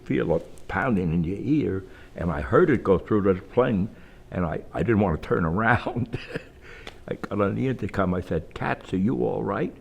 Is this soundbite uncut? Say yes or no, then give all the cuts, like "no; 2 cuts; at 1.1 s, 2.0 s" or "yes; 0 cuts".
no; 1 cut; at 4.7 s